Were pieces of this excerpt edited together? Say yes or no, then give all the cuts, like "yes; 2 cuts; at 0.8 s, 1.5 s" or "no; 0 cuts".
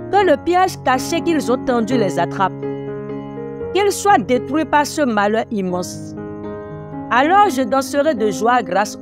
yes; 4 cuts; at 2.5 s, 3.7 s, 5.8 s, 7.1 s